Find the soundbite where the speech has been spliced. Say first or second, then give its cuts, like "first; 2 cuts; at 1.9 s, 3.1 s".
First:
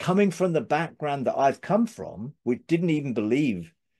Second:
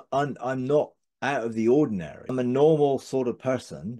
second; 1 cut; at 2.3 s